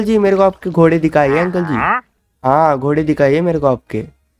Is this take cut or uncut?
uncut